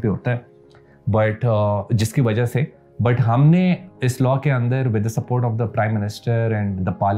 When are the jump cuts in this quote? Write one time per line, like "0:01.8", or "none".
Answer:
none